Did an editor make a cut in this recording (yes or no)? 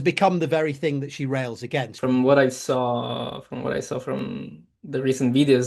yes